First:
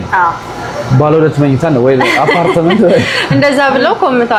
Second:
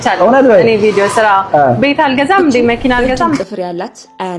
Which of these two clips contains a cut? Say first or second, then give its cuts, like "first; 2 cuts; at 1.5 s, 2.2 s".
second; 1 cut; at 3.4 s